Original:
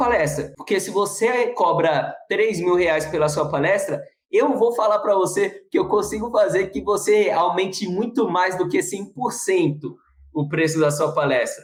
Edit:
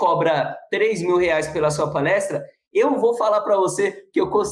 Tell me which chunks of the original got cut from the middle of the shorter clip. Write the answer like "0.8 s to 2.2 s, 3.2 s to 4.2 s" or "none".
none